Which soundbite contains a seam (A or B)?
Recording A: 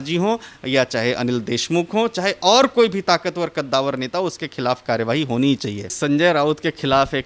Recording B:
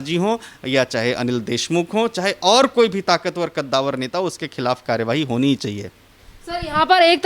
A